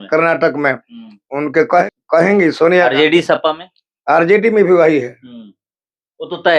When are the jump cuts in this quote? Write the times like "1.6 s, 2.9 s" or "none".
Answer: 1.8 s